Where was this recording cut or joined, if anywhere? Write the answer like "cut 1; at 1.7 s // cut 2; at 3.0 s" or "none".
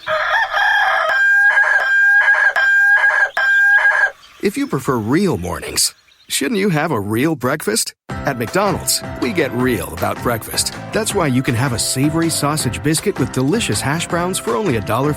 cut 1; at 1.1 s